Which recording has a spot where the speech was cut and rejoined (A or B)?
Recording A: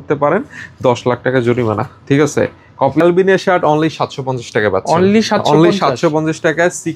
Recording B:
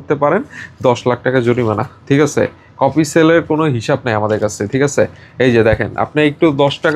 A